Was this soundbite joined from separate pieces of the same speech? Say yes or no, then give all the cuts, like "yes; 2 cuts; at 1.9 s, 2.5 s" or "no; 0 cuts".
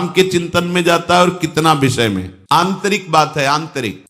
no; 0 cuts